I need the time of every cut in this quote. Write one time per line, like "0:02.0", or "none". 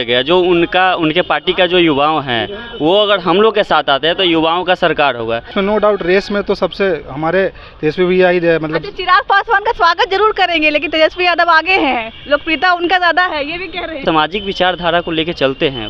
0:05.5
0:14.0